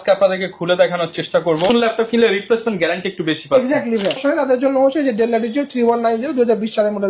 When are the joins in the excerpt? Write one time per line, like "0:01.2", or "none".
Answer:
0:01.7
0:04.2